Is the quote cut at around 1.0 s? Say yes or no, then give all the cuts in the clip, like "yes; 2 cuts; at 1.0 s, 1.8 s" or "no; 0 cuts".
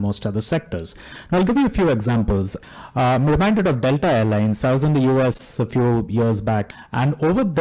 no; 2 cuts; at 2.5 s, 6.7 s